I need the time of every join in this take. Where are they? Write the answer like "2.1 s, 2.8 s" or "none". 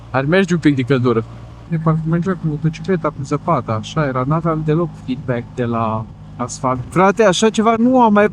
1.7 s, 6.8 s